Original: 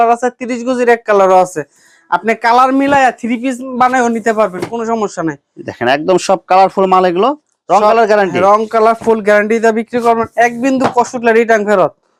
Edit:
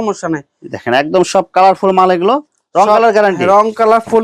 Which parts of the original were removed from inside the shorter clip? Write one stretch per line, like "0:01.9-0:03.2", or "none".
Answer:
none

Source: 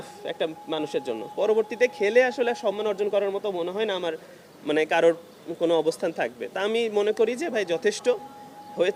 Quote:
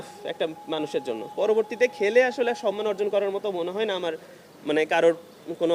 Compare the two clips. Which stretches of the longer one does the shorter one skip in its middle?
none

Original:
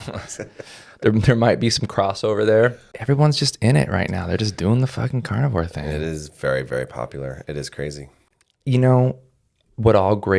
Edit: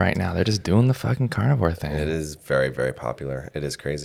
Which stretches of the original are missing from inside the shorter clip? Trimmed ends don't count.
none

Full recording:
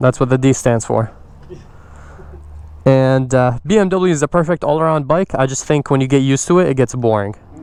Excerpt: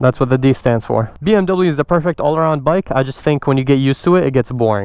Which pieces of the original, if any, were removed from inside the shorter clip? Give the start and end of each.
0:01.2-0:03.6

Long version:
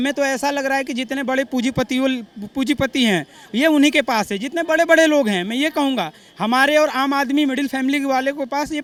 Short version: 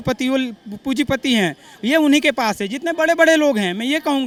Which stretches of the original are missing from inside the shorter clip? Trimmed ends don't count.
none

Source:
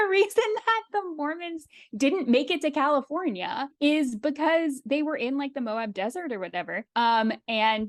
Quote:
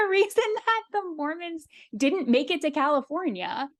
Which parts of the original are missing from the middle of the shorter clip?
none

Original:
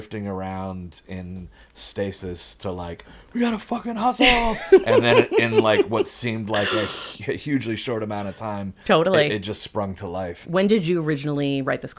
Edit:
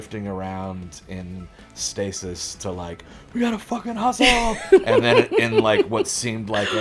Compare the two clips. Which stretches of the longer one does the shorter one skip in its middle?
none

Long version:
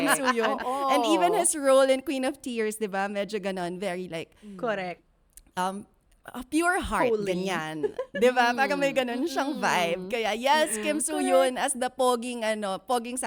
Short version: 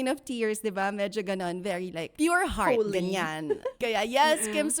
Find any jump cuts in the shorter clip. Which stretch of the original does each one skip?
0:04.3-0:06.4
0:08.1-0:10.1

